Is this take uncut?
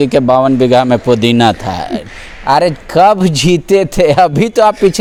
yes; 0 cuts

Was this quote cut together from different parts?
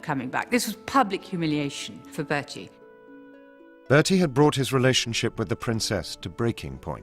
yes; 1 cut; at 5.2 s

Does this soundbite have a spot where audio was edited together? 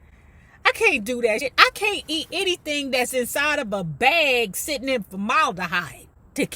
yes; 1 cut; at 1.4 s

